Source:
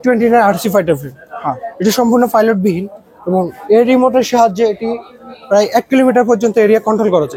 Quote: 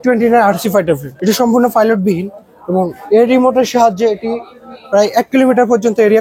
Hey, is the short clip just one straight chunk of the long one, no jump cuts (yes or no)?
no